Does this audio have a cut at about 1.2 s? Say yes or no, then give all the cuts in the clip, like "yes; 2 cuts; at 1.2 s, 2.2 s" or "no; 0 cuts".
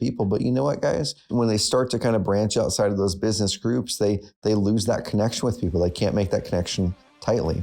yes; 1 cut; at 1.2 s